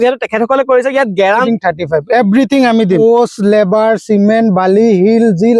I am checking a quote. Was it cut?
yes; 2 cuts; at 1.5 s, 3.0 s

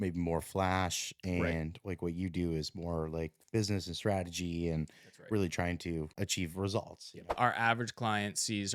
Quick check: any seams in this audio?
yes; 2 cuts; at 6.1 s, 7.4 s

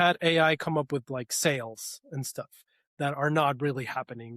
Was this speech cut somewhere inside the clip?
no; 0 cuts

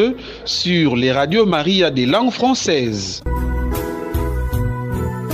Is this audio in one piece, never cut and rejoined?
no; 1 cut; at 3.1 s

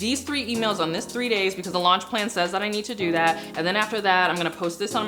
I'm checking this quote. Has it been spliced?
no; 0 cuts

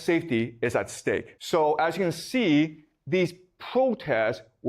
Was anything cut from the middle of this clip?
yes; 1 cut; at 1.3 s

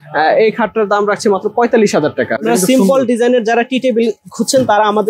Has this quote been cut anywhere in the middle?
yes; 1 cut; at 2.4 s

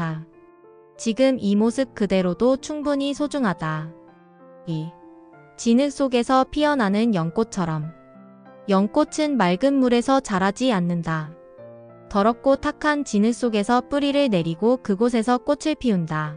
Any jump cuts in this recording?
yes; 1 cut; at 0.9 s

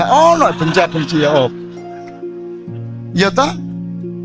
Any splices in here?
no; 0 cuts

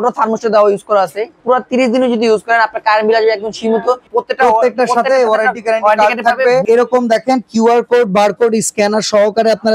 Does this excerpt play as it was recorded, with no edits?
no; 3 cuts; at 1.3 s, 4.0 s, 6.6 s

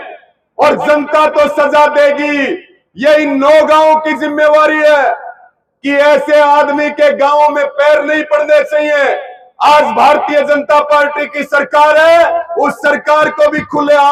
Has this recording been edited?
no; 0 cuts

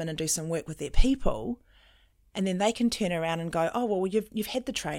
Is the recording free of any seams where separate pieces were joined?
yes; 0 cuts

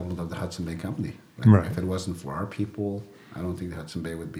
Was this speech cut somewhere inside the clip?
no; 0 cuts

